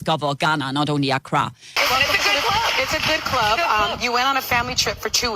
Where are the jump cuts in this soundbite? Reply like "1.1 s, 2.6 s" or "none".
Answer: 1.7 s